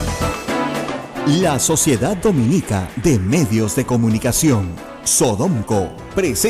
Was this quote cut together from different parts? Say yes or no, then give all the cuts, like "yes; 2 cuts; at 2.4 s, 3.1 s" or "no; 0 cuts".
yes; 1 cut; at 1.1 s